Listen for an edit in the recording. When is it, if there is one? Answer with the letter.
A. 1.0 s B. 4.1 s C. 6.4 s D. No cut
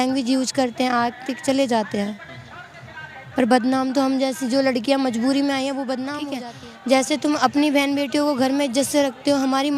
C